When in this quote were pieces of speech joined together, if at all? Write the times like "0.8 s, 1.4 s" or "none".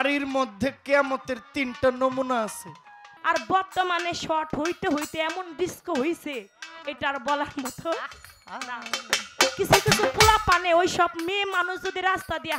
3.1 s